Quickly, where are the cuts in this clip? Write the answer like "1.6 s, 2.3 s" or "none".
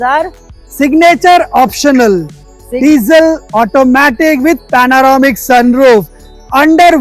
none